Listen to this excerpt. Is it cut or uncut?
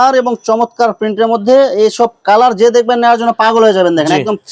uncut